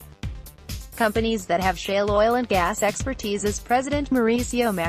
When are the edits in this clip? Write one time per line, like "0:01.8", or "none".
0:00.9

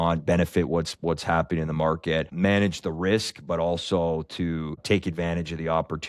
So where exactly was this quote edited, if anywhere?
0:02.3
0:04.8

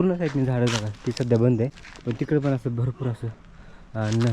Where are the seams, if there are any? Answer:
0:01.9

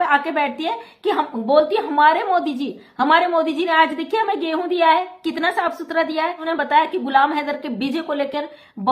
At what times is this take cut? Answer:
0:06.4

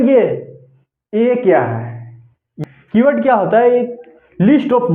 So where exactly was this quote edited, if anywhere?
0:02.5

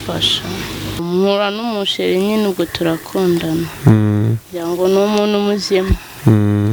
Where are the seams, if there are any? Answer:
0:01.0

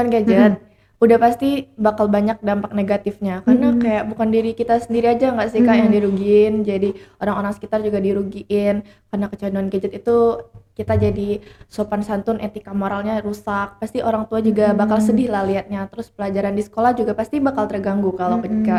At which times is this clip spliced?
none

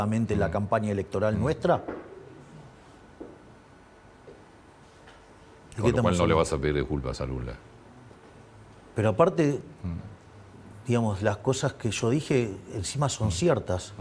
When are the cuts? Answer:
none

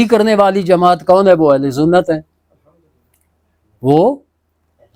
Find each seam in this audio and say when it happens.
none

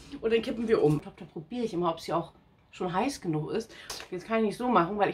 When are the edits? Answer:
0:01.0
0:03.9

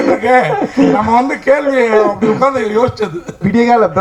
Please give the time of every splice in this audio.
none

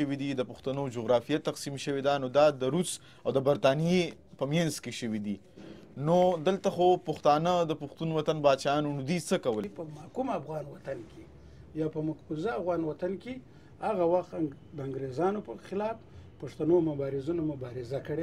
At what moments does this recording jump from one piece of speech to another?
0:09.8

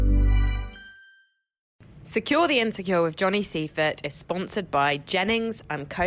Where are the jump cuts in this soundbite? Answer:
0:01.8

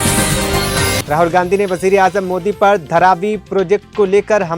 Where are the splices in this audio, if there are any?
0:01.0

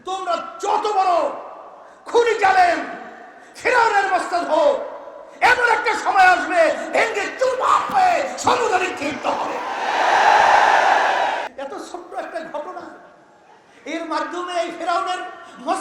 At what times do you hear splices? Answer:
0:11.5

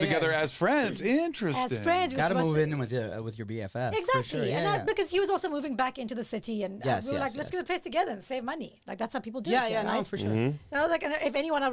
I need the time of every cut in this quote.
none

